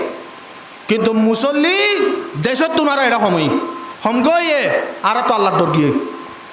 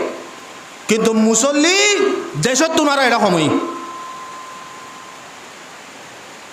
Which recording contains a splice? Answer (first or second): first